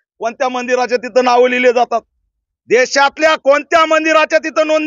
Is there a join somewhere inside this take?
no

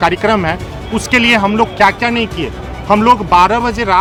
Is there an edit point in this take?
no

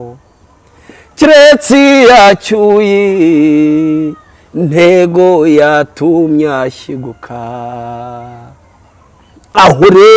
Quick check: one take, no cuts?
yes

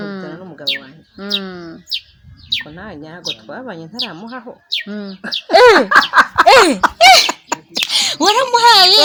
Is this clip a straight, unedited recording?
yes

